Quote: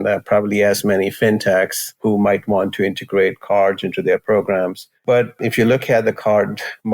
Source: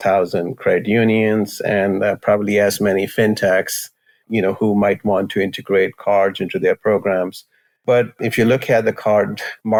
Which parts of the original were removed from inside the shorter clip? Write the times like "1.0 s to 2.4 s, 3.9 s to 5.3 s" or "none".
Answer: 4.0 s to 4.6 s, 7.4 s to 7.7 s